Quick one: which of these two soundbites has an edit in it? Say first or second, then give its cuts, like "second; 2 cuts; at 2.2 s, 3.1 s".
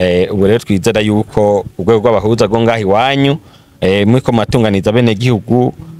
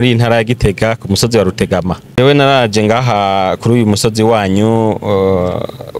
second; 1 cut; at 2.0 s